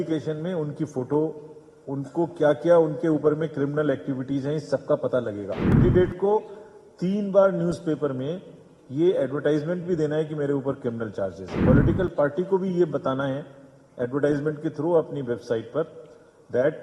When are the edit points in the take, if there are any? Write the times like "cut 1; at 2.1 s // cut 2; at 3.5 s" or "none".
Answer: cut 1; at 5.7 s // cut 2; at 11.5 s